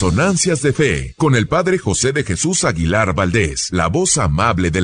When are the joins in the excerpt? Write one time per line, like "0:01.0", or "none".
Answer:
0:01.1
0:03.6